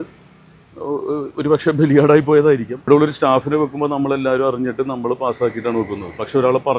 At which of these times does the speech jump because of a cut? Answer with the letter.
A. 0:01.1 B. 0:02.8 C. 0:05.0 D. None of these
B